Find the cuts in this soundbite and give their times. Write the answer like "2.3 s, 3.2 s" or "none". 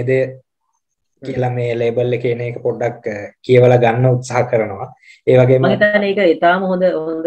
none